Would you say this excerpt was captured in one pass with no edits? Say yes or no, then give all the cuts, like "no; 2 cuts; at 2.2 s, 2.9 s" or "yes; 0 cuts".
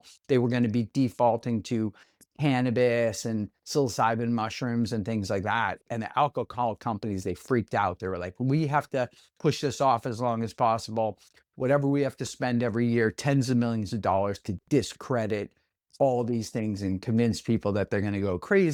yes; 0 cuts